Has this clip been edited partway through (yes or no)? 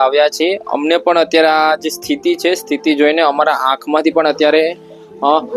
no